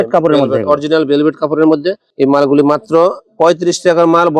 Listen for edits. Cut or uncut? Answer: cut